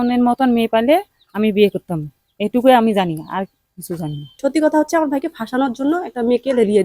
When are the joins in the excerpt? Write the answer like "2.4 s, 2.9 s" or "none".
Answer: 4.3 s